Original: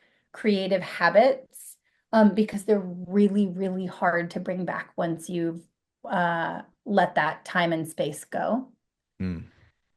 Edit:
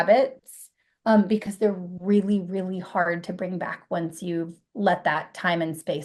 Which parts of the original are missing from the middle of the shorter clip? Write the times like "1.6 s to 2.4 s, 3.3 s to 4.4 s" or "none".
5.7 s to 6.7 s